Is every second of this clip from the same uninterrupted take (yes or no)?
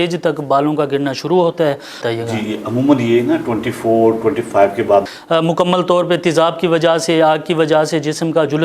no